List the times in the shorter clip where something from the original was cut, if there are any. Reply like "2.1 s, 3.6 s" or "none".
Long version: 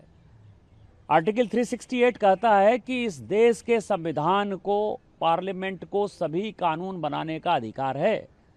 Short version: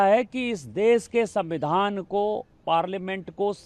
none